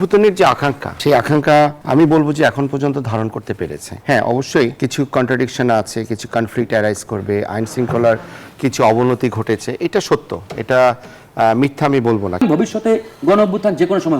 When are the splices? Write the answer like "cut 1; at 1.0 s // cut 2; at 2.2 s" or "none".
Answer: cut 1; at 1.0 s // cut 2; at 1.8 s // cut 3; at 3.9 s // cut 4; at 4.7 s // cut 5; at 12.4 s